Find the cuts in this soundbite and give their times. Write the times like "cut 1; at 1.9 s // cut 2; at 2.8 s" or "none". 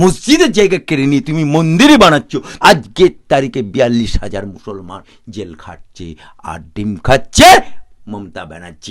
cut 1; at 2.5 s // cut 2; at 5.1 s